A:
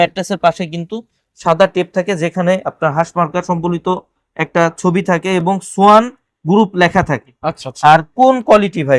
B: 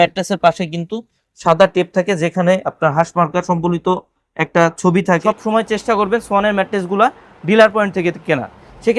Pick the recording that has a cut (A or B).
B